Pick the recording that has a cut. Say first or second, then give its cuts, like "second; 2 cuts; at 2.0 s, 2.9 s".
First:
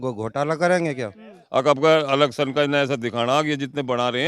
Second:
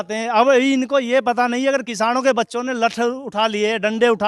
first; 1 cut; at 1.4 s